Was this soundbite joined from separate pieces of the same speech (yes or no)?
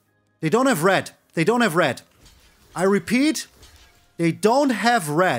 no